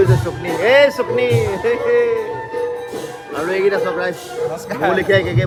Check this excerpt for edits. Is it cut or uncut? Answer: uncut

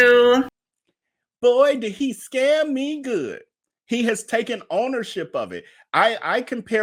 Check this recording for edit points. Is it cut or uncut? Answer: uncut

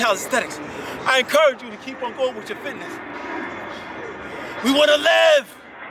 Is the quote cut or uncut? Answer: uncut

